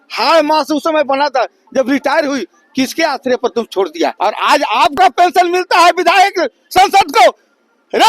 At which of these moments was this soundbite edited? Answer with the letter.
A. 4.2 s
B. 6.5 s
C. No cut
A